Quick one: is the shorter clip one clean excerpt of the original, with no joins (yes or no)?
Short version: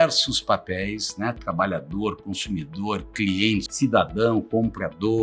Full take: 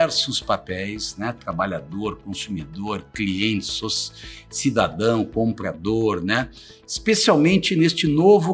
no